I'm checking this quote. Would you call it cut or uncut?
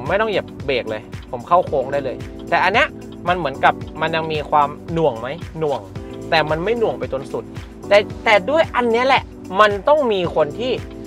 uncut